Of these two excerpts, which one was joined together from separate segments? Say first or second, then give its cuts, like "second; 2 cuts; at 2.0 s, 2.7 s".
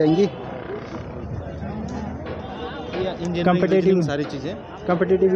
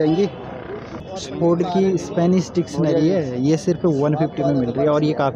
second; 1 cut; at 1.2 s